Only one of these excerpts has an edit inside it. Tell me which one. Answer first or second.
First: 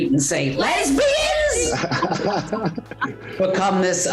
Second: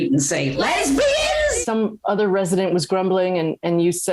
second